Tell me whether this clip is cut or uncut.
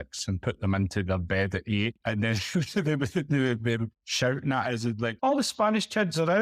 cut